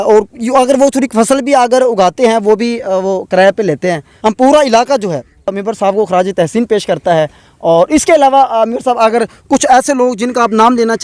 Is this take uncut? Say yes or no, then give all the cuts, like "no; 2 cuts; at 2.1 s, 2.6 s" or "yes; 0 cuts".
no; 2 cuts; at 4.1 s, 5.6 s